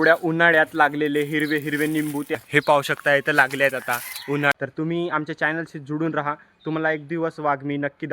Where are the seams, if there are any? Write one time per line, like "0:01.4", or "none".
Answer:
0:02.3
0:04.5